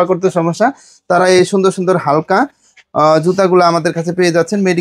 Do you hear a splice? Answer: no; 0 cuts

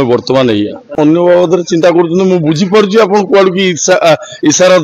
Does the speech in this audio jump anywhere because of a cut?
yes; 1 cut; at 1.0 s

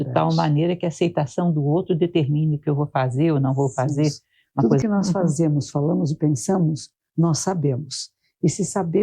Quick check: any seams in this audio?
yes; 1 cut; at 4.6 s

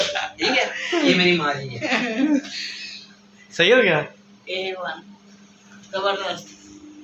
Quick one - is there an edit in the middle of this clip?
no; 0 cuts

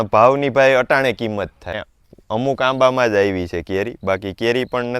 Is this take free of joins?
no; 1 cut; at 1.8 s

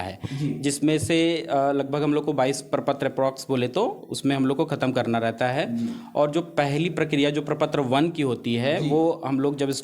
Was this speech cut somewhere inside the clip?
no; 0 cuts

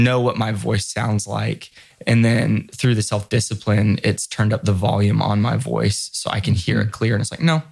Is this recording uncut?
yes; 0 cuts

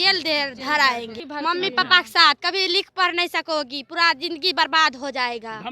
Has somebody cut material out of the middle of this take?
yes; 1 cut; at 1.2 s

